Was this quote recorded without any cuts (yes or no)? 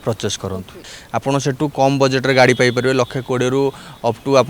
no